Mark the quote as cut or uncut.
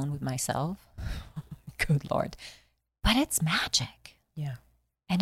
uncut